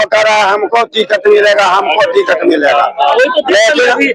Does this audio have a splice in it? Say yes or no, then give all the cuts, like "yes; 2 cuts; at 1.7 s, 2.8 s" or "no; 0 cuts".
no; 0 cuts